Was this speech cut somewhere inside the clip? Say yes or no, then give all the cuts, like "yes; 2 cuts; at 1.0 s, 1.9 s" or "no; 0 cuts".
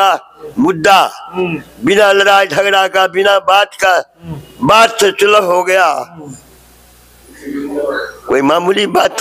no; 0 cuts